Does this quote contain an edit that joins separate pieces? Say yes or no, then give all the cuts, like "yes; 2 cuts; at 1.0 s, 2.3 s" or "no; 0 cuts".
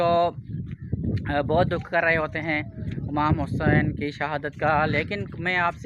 no; 0 cuts